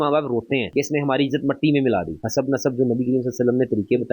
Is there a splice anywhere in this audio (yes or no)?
yes